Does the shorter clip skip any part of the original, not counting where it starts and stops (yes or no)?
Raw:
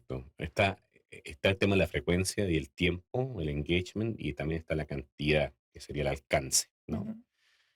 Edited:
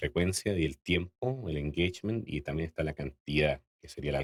no